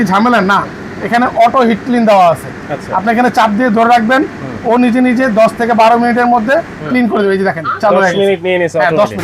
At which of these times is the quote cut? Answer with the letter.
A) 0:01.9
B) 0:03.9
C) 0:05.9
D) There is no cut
D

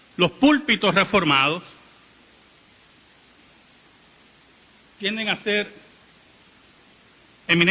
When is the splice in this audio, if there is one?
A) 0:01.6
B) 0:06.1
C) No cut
B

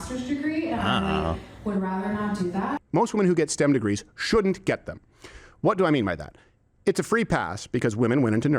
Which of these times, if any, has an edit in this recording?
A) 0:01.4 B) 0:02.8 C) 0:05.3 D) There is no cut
B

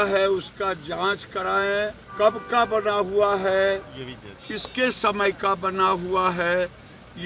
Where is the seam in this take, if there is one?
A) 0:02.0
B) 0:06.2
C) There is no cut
A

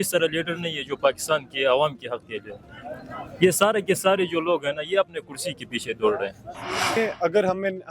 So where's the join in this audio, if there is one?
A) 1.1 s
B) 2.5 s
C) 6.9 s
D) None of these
C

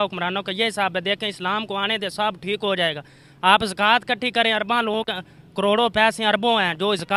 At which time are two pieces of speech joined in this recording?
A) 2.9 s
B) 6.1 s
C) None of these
C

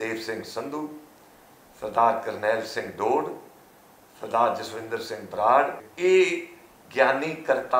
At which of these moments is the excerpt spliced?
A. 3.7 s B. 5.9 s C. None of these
B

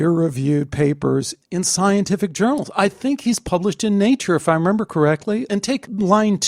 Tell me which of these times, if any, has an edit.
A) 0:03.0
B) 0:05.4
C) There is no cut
B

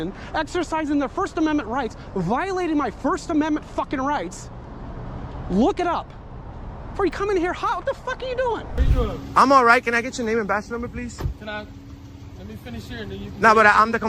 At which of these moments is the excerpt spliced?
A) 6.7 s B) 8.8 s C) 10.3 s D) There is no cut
B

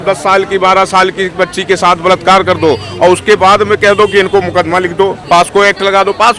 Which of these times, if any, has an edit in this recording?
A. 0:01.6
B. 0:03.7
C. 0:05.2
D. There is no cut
C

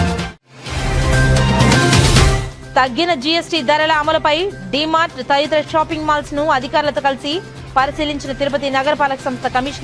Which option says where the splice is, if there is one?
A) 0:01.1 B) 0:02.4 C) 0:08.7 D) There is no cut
B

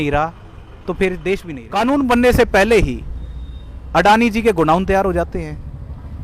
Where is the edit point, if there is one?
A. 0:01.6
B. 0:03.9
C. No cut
A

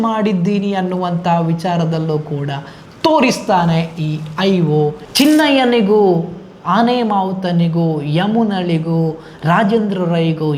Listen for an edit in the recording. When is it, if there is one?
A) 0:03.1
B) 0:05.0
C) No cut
B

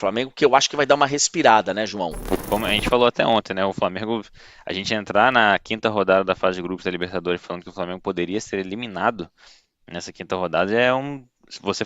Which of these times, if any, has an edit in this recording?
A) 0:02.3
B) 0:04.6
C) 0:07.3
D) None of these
A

